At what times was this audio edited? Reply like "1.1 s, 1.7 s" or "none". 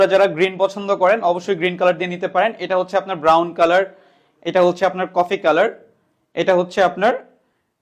none